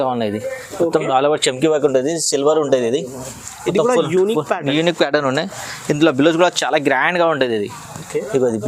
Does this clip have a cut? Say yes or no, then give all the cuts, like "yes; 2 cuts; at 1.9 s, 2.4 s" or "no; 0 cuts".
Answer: no; 0 cuts